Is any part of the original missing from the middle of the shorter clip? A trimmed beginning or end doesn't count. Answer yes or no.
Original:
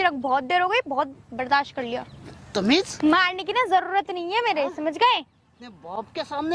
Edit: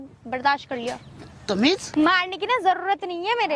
no